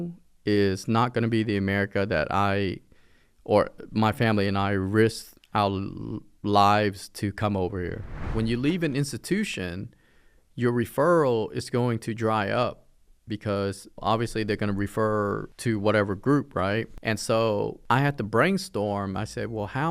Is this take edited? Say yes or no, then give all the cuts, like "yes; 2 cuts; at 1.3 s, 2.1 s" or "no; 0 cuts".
yes; 5 cuts; at 8.3 s, 14.0 s, 15.5 s, 16.9 s, 17.8 s